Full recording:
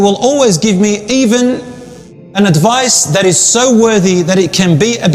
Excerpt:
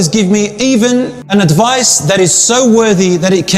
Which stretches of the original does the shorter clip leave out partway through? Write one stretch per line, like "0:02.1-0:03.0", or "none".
0:01.7-0:02.2